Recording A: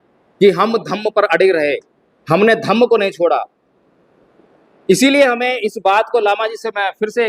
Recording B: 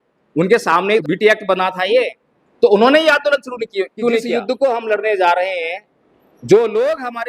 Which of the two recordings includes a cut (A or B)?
B